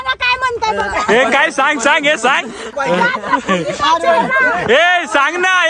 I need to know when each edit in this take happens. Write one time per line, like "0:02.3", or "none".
none